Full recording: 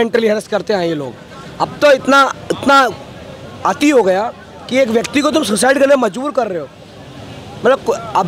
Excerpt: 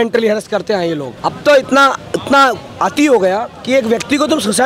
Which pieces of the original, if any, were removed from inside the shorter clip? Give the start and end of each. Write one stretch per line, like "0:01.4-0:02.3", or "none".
0:01.1-0:01.5
0:03.0-0:03.5
0:04.4-0:04.6